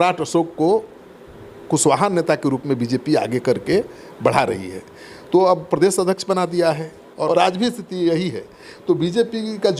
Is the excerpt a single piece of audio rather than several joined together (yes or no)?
no